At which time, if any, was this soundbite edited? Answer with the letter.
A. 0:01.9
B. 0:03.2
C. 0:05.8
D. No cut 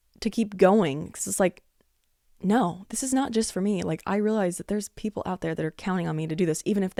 D